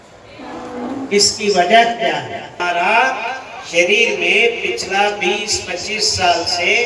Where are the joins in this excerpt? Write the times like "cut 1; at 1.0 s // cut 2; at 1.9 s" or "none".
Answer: cut 1; at 2.6 s